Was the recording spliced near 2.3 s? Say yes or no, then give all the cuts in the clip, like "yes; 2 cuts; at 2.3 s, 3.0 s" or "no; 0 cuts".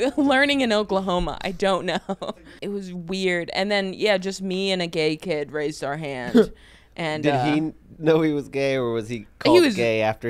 yes; 1 cut; at 2.3 s